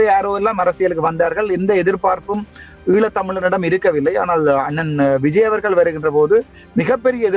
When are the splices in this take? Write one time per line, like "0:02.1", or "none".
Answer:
none